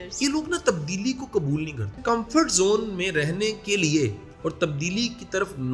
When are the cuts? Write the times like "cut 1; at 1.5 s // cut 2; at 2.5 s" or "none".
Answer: cut 1; at 2.0 s // cut 2; at 4.3 s